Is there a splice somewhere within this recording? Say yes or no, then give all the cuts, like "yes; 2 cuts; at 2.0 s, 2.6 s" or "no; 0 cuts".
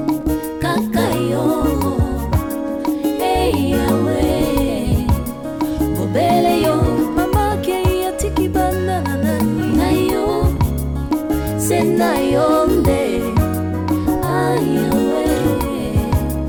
no; 0 cuts